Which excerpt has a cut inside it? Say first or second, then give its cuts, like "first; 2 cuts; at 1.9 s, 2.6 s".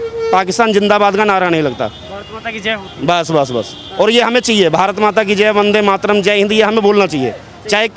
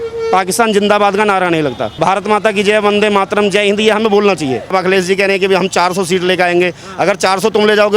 second; 2 cuts; at 2.0 s, 4.7 s